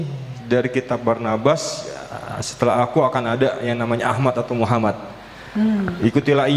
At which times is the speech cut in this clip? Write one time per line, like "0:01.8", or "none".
none